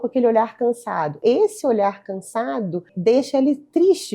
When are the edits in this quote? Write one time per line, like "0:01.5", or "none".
0:01.2
0:02.9